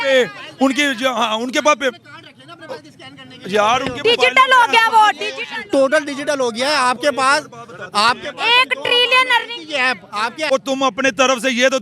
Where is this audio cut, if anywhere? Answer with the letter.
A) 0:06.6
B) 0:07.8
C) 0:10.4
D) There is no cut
C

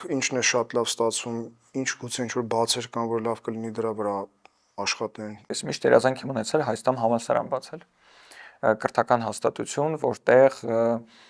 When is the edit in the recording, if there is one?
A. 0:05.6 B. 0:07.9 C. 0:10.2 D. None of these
A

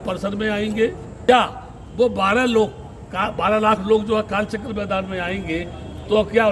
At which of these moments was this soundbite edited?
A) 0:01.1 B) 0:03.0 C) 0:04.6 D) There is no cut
A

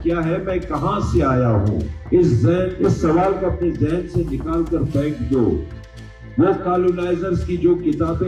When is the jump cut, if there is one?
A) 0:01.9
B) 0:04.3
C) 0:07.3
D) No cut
A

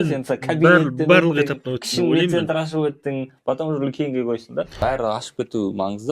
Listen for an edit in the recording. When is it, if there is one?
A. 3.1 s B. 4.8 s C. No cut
B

